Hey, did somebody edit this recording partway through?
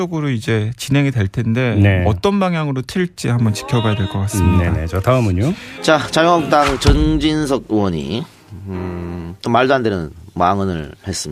no; 0 cuts

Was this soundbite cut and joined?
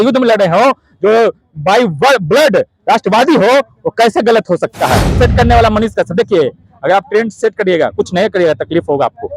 yes; 1 cut; at 5.1 s

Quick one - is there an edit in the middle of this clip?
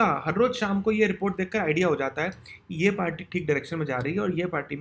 no; 0 cuts

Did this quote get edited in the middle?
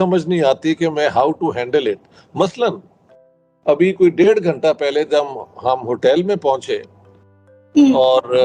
no; 0 cuts

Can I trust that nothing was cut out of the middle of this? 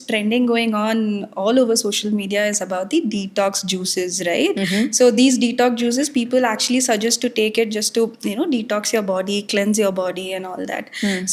yes; 0 cuts

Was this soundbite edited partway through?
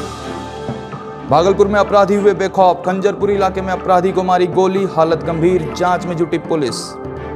yes; 1 cut; at 1.0 s

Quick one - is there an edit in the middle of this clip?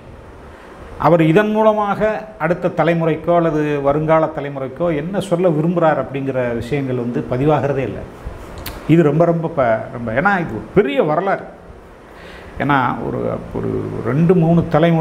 no; 0 cuts

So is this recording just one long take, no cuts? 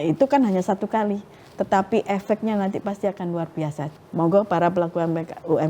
no; 1 cut; at 3.9 s

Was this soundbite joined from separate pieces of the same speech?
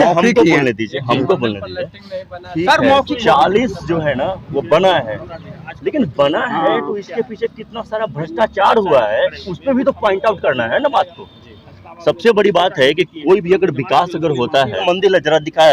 yes; 1 cut; at 14.8 s

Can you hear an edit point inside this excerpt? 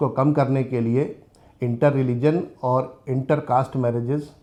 no; 0 cuts

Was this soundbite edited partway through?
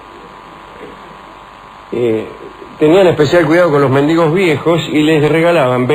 yes; 1 cut; at 2.9 s

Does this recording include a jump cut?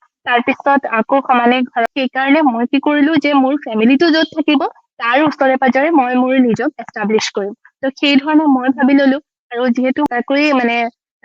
yes; 2 cuts; at 1.8 s, 10.0 s

